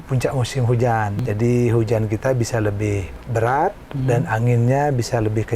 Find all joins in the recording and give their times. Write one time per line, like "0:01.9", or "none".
0:01.1
0:03.1

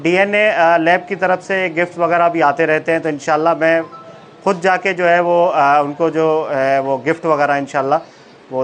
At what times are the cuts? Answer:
none

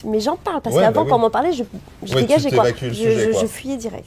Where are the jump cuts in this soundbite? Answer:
none

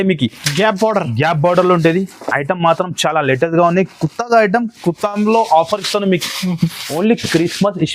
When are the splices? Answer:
0:06.8

